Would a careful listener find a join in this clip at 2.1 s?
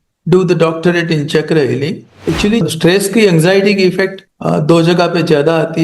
yes; 1 cut; at 2.1 s

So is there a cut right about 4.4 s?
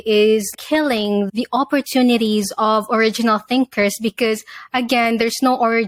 no; 0 cuts

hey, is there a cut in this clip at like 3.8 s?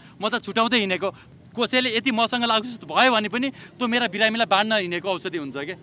no; 1 cut; at 1.2 s

